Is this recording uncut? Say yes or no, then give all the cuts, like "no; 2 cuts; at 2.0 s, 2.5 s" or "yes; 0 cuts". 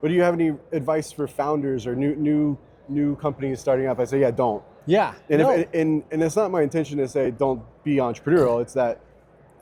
yes; 0 cuts